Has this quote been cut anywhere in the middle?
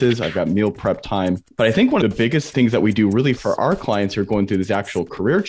yes; 1 cut; at 2.5 s

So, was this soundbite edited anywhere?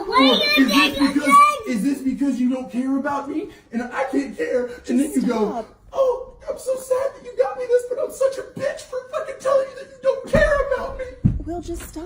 no; 0 cuts

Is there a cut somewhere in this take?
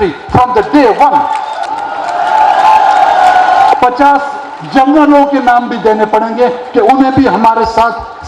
yes; 2 cuts; at 1.6 s, 3.7 s

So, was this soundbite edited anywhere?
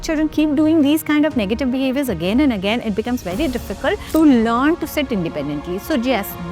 yes; 1 cut; at 4.0 s

